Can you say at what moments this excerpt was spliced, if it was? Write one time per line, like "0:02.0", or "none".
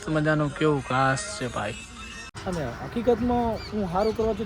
0:02.3